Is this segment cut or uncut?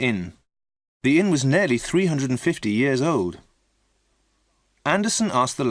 cut